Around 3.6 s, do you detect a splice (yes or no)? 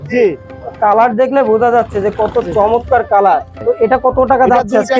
yes